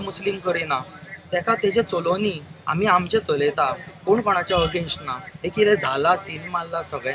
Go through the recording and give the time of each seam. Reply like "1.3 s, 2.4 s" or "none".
none